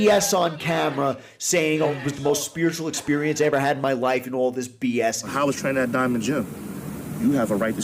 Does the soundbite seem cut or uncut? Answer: cut